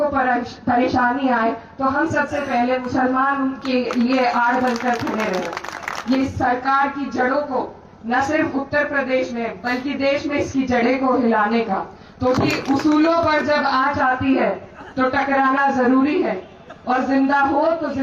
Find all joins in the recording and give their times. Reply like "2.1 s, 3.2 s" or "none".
6.2 s, 12.4 s

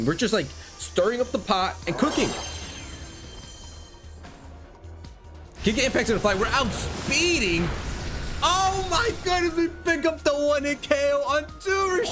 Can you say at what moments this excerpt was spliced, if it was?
none

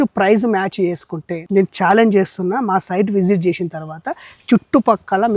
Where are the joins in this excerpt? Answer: none

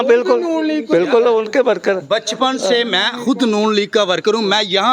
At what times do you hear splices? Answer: none

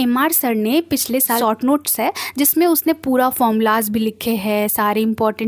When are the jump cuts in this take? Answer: 1.4 s

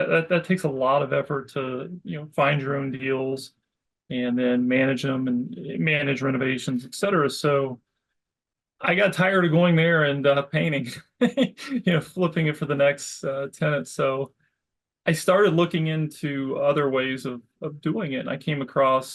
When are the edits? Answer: none

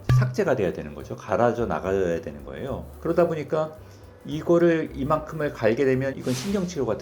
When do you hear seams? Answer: 6.1 s

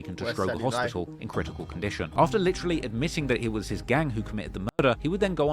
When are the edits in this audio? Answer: 2.1 s

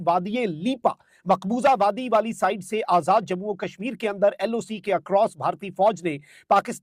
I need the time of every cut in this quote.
none

